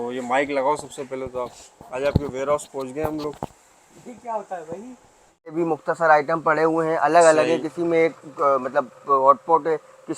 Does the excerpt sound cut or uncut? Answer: cut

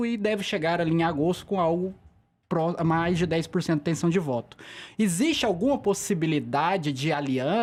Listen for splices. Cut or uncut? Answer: uncut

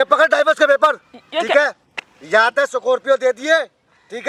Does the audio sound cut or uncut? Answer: uncut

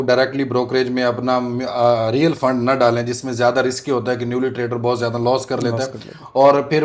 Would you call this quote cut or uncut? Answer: uncut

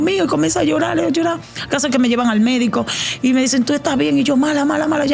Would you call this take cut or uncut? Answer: uncut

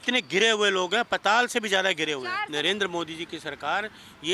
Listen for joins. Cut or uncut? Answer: cut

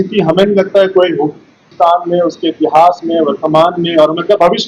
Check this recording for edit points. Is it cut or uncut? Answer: cut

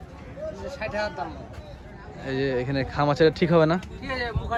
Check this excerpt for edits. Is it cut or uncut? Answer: uncut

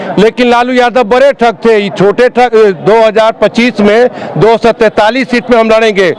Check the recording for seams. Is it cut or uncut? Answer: cut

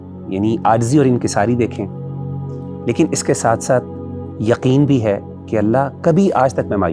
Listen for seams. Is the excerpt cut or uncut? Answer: uncut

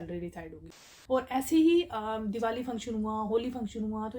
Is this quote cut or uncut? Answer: cut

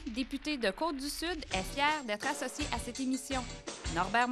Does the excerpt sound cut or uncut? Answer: uncut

